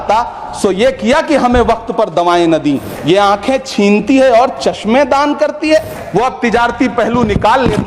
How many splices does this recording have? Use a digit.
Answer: 2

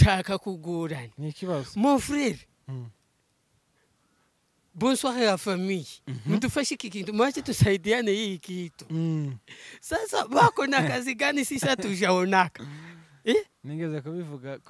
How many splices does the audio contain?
0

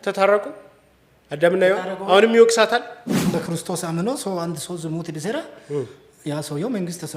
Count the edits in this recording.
1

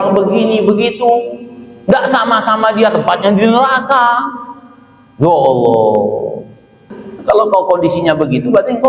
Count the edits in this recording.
1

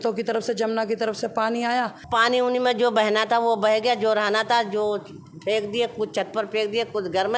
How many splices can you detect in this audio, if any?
1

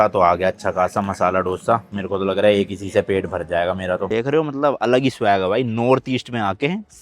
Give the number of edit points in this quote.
1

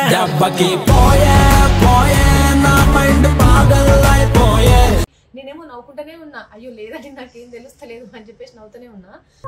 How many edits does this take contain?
1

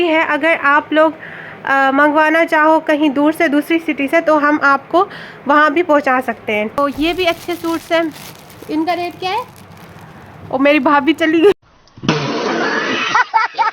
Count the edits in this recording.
2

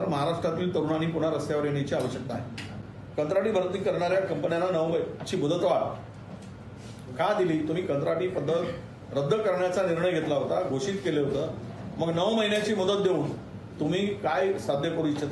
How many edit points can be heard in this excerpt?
1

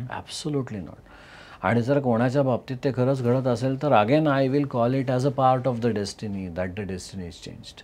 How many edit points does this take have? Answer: 0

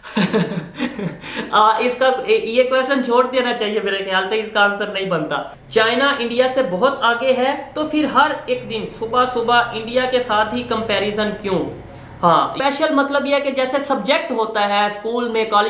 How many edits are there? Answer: 2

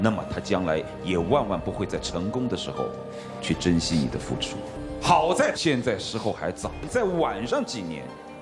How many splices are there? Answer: 2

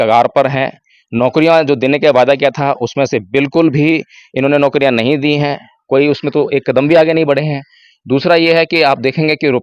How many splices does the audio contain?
0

